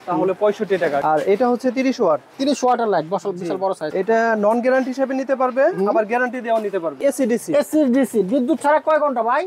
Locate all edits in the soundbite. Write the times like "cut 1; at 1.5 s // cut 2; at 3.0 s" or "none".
cut 1; at 1.0 s // cut 2; at 3.9 s // cut 3; at 7.0 s